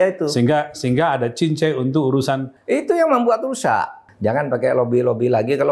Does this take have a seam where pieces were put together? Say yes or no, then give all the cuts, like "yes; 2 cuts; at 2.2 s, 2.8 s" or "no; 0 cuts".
yes; 2 cuts; at 2.5 s, 4.0 s